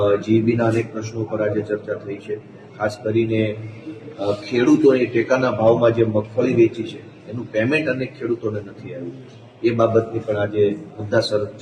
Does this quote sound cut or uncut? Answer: uncut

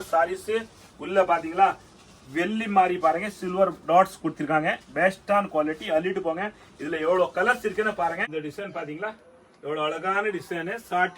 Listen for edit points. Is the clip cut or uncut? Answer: cut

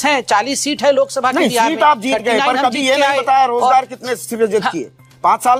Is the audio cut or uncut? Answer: uncut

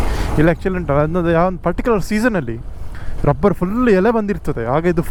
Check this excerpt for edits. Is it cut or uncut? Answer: uncut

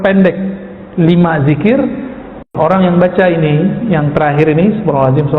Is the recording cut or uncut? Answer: cut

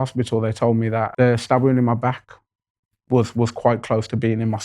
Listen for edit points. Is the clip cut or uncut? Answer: cut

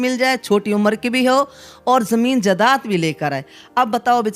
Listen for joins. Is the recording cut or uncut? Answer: uncut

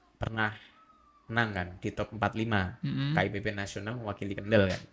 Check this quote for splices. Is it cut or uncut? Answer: uncut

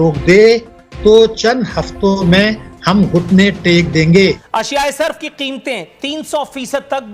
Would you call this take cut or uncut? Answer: cut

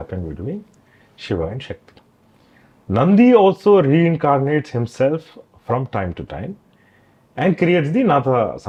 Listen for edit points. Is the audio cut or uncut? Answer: uncut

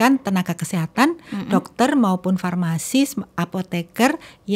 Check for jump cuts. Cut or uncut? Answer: uncut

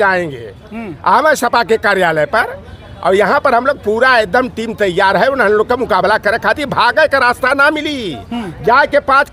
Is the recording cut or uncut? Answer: uncut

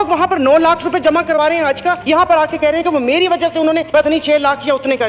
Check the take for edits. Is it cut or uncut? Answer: cut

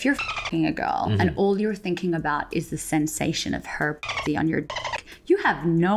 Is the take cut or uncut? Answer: uncut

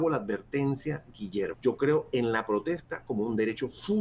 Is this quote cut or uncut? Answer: cut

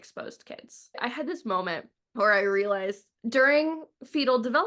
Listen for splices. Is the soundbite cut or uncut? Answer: cut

